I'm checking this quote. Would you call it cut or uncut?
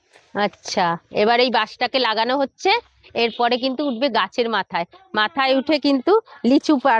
uncut